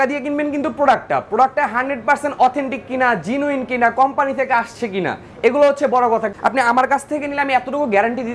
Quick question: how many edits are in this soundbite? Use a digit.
1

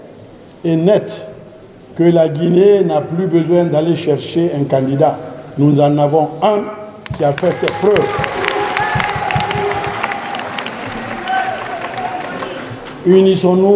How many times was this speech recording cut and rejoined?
0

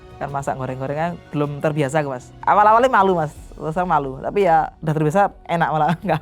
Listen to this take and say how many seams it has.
2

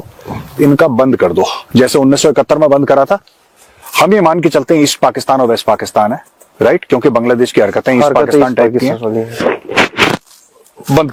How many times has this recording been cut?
0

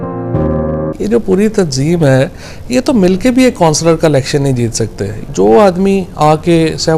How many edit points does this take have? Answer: 2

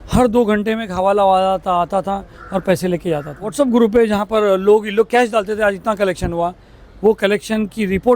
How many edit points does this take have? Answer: 1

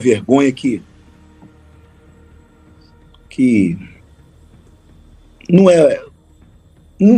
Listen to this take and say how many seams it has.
0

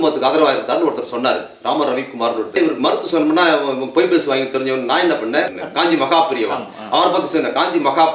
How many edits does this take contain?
2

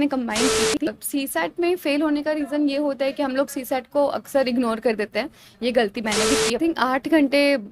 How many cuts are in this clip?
2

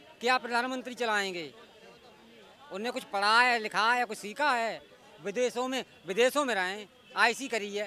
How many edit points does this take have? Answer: 0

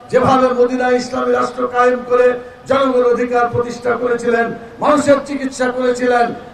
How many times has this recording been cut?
0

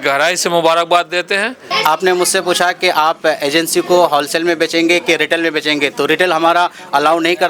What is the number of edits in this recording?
1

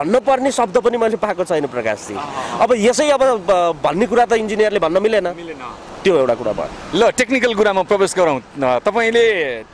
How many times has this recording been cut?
0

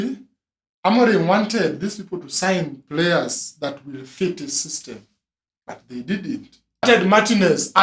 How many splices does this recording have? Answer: 1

